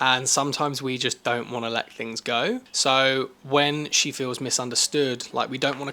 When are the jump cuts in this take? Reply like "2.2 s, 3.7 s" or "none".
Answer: 2.7 s